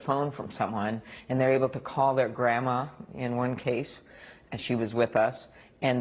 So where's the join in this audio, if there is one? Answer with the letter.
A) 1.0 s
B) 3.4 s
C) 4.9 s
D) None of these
B